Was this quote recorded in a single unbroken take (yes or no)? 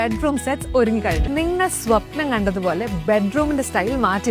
no